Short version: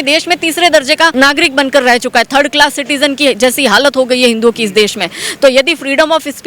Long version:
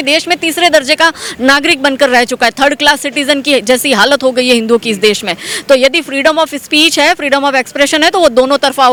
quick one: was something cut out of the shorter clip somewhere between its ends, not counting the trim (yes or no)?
yes